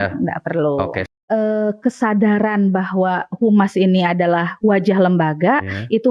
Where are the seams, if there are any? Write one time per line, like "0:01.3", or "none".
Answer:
0:01.1